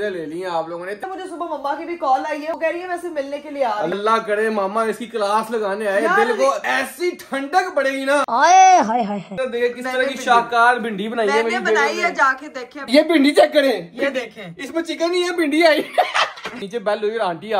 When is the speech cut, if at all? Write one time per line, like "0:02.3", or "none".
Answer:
0:01.0
0:02.6
0:04.0
0:09.3
0:12.8
0:16.7